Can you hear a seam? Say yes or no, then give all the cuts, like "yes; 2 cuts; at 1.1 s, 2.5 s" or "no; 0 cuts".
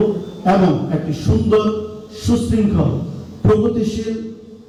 no; 0 cuts